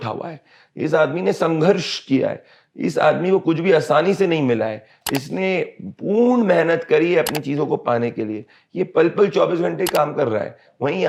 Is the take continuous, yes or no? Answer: yes